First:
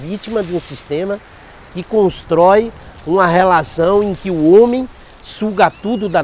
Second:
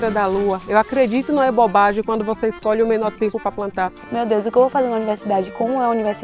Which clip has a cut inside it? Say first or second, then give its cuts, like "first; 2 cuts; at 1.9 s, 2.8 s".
second; 1 cut; at 4.1 s